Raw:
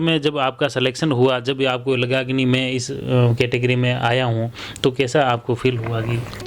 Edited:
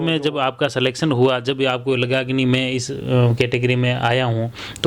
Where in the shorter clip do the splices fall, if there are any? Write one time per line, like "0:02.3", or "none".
none